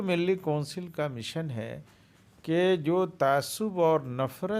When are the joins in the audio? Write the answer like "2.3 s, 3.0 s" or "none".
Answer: none